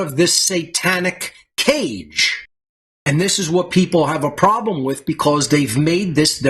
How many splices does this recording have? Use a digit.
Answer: 1